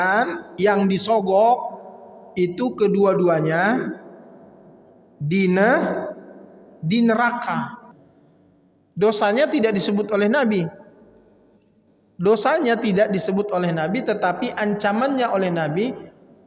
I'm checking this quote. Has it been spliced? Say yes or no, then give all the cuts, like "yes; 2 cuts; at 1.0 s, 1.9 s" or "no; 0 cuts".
yes; 1 cut; at 7.8 s